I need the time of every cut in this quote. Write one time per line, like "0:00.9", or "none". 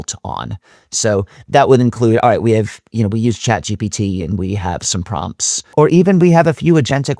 0:05.6